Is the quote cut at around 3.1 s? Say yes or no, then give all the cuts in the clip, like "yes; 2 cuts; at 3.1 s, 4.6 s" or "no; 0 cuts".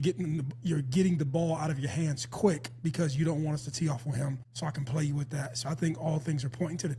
no; 1 cut; at 4.5 s